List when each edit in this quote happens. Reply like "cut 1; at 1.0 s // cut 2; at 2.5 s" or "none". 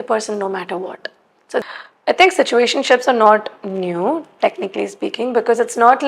cut 1; at 1.6 s